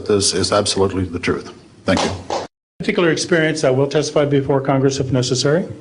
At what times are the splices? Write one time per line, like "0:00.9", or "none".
0:02.7